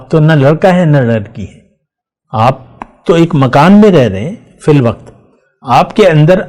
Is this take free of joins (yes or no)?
yes